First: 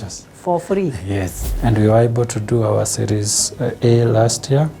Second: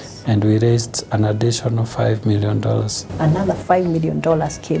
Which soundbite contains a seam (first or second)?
first